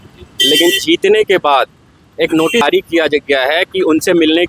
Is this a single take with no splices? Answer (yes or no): no